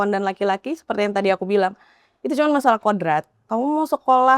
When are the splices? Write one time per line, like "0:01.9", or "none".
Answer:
0:03.4